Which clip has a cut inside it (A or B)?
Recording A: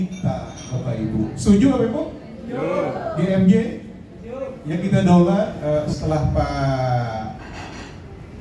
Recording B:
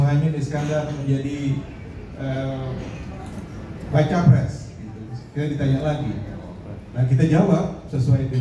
A